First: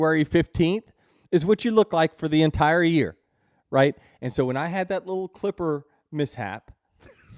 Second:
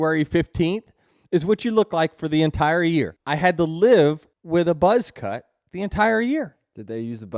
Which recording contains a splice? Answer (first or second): second